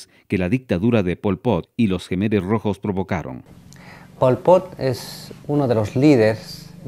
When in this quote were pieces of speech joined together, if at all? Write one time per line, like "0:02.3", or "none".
none